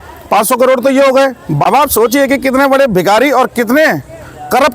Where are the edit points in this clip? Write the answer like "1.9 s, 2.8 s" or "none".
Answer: 1.6 s